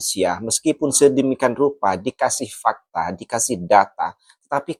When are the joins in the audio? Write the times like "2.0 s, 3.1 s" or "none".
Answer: none